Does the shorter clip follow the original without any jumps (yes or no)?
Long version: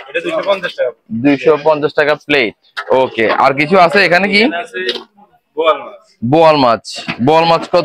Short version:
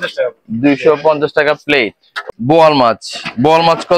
no